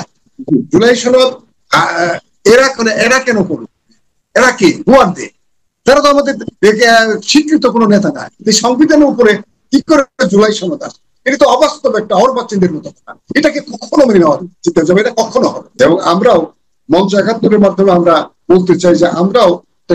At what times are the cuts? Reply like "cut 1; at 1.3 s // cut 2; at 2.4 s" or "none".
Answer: cut 1; at 8.3 s // cut 2; at 10.1 s // cut 3; at 15.7 s